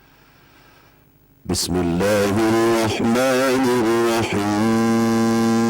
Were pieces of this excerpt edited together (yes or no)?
yes